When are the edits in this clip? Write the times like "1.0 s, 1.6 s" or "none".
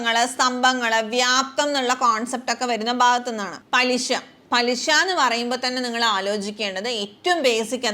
3.5 s